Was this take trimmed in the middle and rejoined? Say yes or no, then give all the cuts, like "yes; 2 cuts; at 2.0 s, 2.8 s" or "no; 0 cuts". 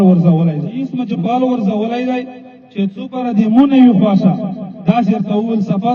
yes; 1 cut; at 1.0 s